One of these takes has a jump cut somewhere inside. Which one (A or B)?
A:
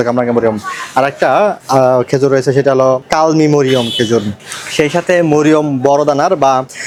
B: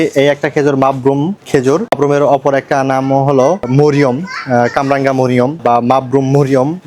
B